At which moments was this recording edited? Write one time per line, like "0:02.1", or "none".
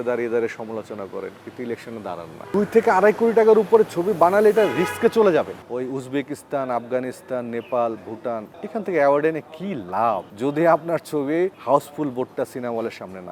0:02.3
0:05.6